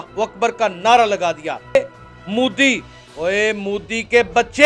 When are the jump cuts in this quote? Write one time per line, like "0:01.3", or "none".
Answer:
0:01.8